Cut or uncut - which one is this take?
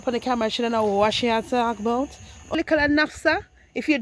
cut